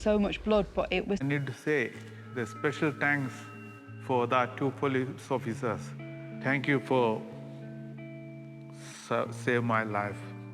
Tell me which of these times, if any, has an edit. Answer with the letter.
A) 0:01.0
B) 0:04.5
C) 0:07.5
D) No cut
A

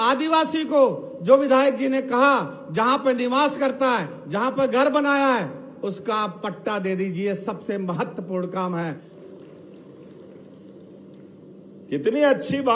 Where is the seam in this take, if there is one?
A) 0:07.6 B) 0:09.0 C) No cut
B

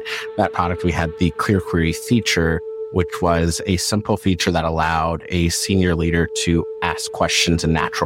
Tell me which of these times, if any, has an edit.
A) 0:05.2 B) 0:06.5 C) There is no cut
C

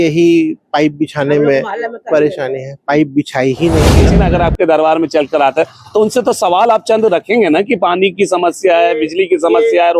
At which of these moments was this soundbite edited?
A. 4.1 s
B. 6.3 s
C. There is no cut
A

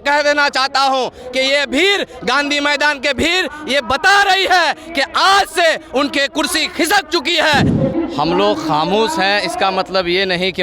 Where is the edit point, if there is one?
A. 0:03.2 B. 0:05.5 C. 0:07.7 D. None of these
C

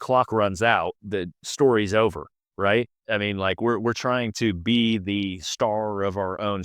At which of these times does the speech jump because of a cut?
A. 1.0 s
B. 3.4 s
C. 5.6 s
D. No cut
A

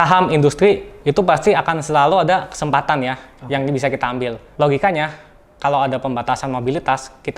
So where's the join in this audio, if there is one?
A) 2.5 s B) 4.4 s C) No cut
B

